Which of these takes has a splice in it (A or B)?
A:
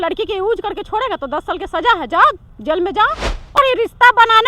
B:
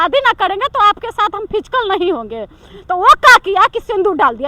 A